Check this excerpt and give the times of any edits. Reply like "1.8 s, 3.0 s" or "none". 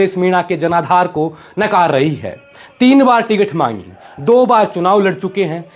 none

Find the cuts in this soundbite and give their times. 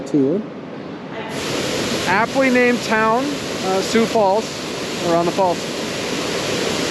1.4 s

